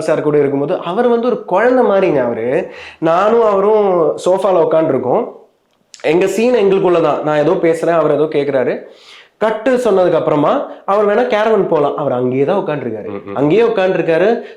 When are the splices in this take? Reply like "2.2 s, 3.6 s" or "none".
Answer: none